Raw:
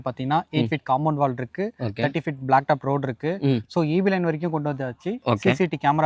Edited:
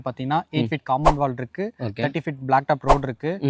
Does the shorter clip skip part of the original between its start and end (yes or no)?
no